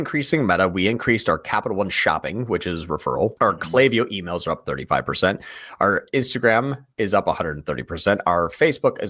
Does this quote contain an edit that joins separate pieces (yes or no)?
yes